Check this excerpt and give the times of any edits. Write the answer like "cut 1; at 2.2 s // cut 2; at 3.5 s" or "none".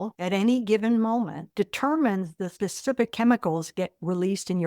cut 1; at 1.5 s // cut 2; at 2.4 s